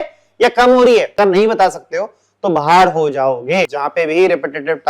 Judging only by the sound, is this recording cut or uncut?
cut